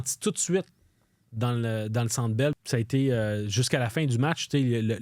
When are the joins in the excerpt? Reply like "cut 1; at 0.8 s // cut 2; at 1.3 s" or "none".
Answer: cut 1; at 2.6 s